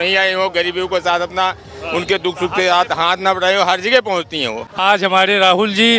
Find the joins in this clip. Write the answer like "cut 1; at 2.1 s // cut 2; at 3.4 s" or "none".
cut 1; at 4.6 s